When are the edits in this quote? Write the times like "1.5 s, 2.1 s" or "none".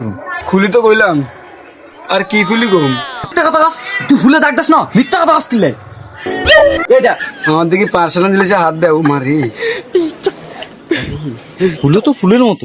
3.3 s, 7.3 s